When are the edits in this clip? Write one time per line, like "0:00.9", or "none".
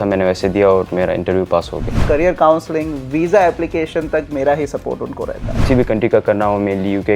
0:02.0
0:05.6